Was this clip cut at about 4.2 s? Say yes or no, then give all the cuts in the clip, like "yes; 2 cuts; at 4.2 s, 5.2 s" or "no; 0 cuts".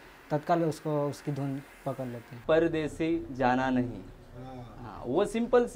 no; 1 cut; at 2.3 s